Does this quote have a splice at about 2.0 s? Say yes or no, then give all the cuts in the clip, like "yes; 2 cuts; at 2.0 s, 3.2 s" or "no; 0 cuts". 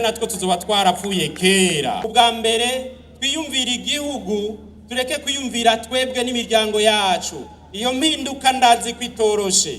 yes; 1 cut; at 2.0 s